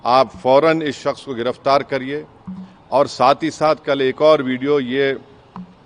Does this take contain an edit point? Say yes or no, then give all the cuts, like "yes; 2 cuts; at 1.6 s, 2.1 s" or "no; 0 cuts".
no; 0 cuts